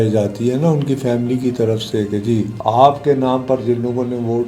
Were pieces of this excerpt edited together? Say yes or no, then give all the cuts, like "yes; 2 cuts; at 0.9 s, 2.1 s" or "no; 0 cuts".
yes; 1 cut; at 2.5 s